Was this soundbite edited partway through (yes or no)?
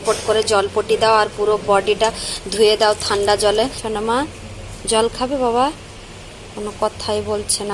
yes